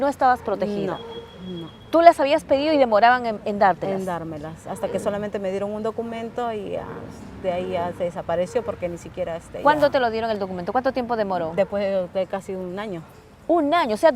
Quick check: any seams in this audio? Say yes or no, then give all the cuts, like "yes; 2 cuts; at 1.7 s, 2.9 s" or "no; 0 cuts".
no; 0 cuts